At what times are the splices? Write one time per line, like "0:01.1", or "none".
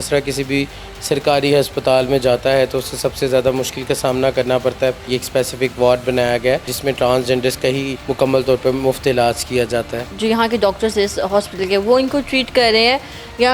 0:05.1
0:06.7
0:08.0
0:10.0